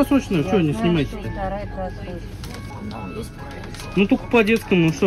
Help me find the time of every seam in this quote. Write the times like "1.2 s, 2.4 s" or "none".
2.7 s